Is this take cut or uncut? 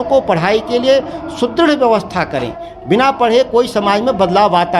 uncut